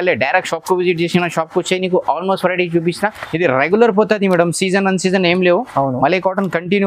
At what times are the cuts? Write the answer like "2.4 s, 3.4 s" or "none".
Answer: 3.2 s